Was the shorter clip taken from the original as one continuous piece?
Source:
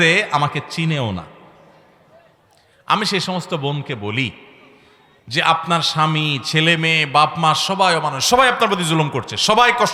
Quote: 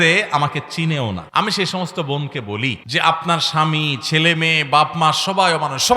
no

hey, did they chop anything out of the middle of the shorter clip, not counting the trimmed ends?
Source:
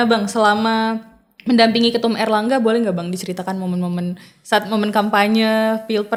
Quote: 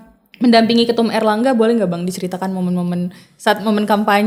no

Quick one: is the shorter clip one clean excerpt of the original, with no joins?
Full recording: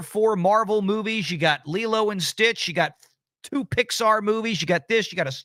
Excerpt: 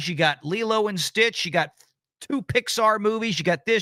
yes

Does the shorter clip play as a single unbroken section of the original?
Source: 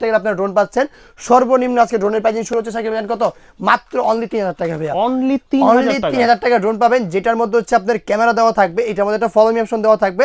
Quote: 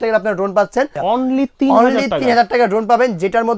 no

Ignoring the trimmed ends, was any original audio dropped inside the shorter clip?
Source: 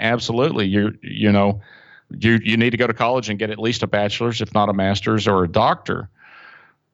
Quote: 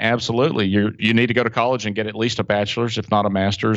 yes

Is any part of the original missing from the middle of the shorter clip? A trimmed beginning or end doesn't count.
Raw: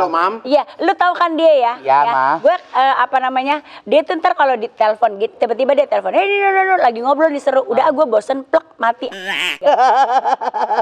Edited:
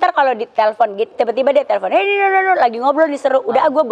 no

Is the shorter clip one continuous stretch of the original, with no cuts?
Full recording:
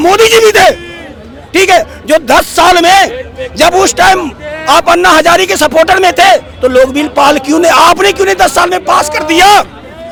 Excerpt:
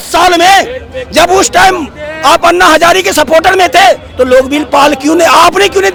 yes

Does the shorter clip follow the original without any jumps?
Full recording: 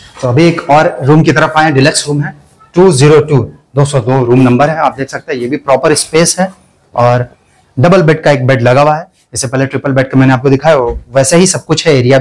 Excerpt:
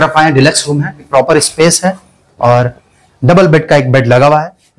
no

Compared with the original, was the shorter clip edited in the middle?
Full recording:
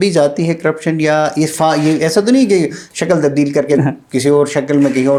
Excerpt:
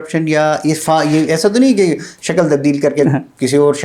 no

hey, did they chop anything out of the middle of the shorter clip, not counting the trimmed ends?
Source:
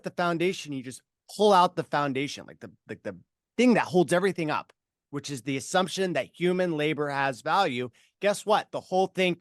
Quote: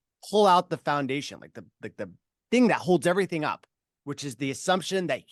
no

